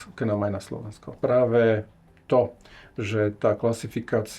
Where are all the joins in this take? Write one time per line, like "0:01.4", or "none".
0:01.2

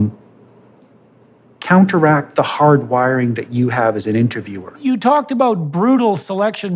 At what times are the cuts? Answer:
0:04.8

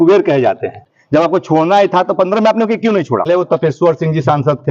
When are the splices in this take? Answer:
0:00.9
0:03.3

